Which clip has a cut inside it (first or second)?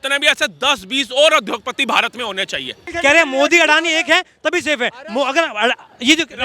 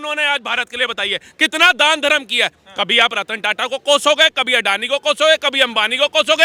first